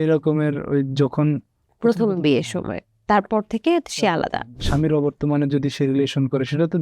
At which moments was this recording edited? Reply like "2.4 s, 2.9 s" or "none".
4.6 s